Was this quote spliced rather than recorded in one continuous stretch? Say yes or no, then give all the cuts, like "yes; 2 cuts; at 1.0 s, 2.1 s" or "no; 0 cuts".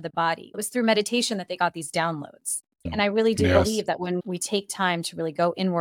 yes; 2 cuts; at 2.9 s, 4.2 s